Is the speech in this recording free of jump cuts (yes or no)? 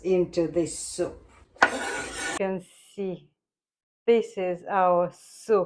no